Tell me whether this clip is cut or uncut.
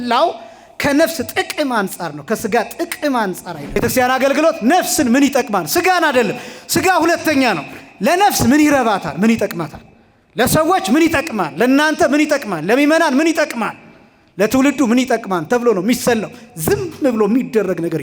cut